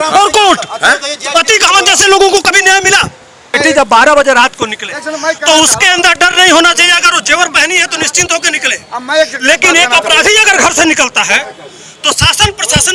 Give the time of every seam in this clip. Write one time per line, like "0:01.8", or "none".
0:03.5